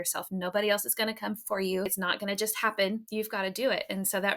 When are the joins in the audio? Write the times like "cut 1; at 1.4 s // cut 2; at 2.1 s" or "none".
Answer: cut 1; at 1.9 s // cut 2; at 3.1 s